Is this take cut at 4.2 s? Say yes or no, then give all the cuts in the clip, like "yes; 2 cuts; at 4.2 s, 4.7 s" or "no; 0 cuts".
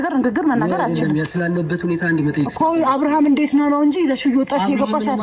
no; 0 cuts